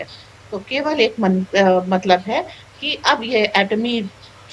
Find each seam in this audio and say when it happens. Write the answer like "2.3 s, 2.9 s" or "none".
none